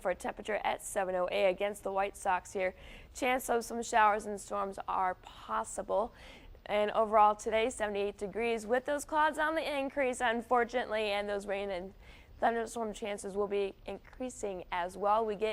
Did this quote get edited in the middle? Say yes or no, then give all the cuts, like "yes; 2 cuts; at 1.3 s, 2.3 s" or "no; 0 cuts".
no; 0 cuts